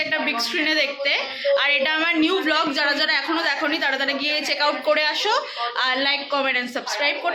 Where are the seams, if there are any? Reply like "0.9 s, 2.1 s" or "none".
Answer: none